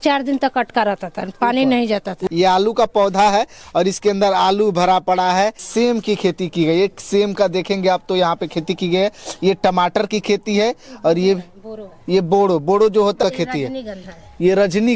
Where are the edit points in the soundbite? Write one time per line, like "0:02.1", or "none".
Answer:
0:02.2
0:05.6
0:13.2